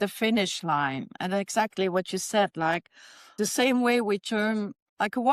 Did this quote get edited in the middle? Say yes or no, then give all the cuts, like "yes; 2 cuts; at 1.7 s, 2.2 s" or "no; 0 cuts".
no; 0 cuts